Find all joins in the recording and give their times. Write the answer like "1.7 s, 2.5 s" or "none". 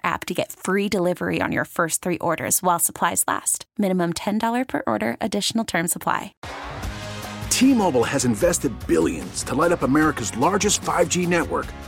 6.4 s

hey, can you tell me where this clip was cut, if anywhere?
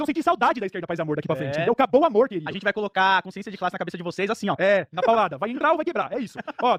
none

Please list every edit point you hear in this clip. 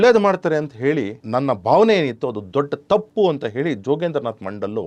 1.2 s

